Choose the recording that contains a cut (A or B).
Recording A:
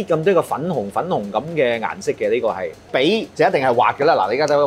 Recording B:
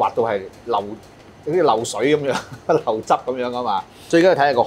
A